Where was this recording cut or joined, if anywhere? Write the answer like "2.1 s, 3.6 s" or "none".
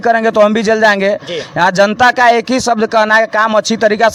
none